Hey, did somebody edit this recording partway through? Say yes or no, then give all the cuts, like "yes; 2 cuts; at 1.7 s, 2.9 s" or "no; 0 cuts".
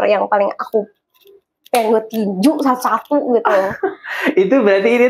no; 0 cuts